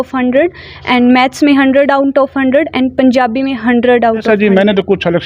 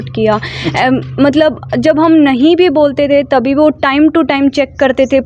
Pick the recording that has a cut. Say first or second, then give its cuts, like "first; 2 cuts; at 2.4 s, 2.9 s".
first; 1 cut; at 4.2 s